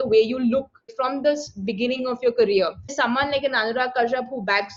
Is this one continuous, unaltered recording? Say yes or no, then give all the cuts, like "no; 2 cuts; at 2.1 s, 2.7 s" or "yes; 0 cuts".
no; 2 cuts; at 0.9 s, 2.9 s